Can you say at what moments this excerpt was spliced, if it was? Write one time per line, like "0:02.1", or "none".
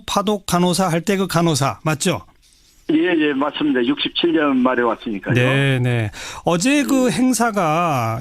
0:06.1